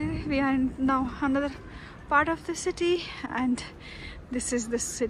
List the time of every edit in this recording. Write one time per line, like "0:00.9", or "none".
none